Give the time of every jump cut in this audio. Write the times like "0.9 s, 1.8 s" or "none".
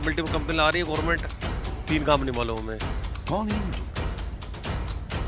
none